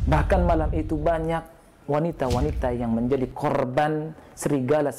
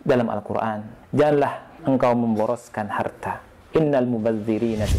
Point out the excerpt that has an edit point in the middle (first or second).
second